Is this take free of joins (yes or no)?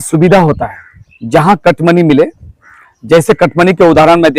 yes